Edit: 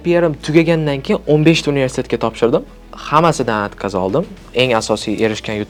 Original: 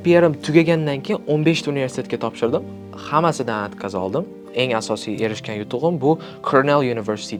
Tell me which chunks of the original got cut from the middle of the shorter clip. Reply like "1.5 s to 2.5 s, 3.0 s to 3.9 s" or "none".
none